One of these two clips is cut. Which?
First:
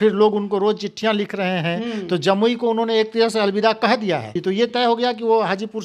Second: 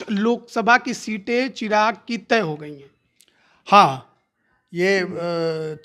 first; 1 cut; at 4.4 s

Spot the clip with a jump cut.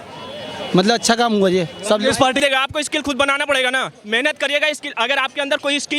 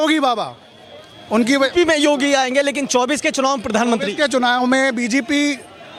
first; 1 cut; at 2.4 s

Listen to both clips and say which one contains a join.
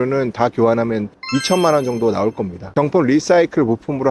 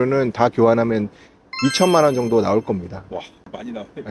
first; 2 cuts; at 1.1 s, 2.6 s

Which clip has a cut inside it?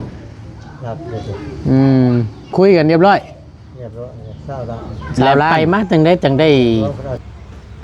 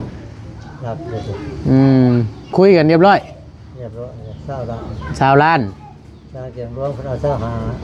first; 1 cut; at 5.5 s

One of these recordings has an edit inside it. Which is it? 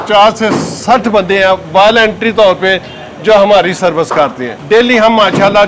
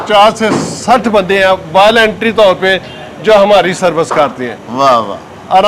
first; 1 cut; at 4.5 s

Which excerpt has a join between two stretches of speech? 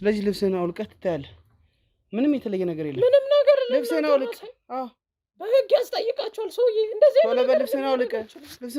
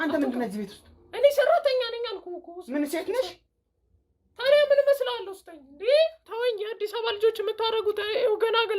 second; 1 cut; at 6.2 s

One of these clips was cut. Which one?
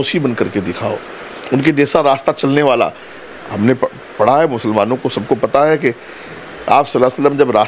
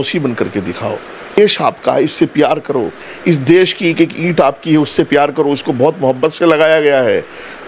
second; 1 cut; at 1.4 s

